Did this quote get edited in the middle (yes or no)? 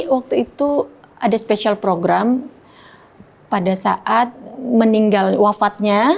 yes